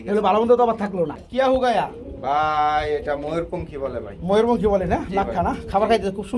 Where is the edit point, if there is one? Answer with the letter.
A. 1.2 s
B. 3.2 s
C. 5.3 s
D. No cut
A